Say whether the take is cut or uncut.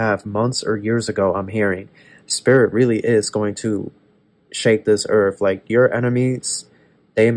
uncut